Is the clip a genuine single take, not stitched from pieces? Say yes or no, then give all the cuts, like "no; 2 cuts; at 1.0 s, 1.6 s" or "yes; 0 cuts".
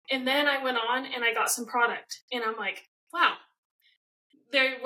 yes; 0 cuts